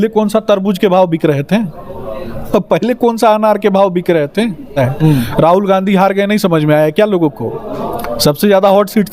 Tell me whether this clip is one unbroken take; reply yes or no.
no